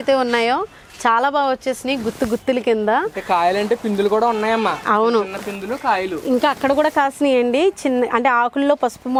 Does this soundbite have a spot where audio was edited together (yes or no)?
no